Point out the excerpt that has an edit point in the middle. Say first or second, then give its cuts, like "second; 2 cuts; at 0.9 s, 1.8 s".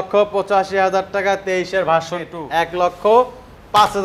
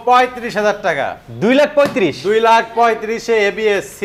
first; 1 cut; at 2.4 s